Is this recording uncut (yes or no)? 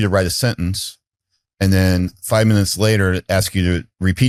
yes